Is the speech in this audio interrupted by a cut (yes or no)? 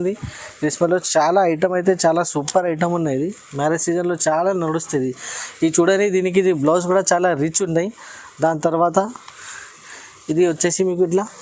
no